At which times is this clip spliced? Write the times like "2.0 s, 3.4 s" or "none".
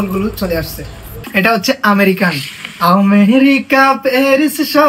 1.2 s